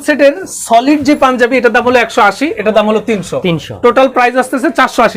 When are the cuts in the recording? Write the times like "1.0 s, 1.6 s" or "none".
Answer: none